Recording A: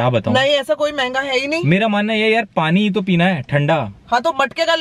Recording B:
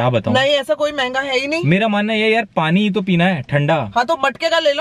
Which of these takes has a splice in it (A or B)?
B